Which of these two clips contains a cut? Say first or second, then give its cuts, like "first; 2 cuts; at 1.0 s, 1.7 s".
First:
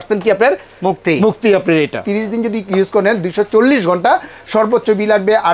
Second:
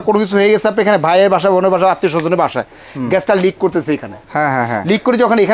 first; 1 cut; at 2.0 s